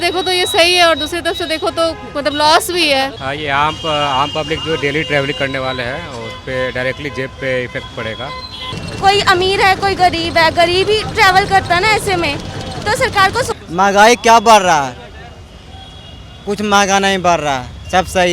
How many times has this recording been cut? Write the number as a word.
three